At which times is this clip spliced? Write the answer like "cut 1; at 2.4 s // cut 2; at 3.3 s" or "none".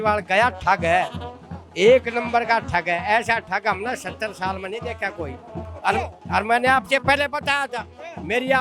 none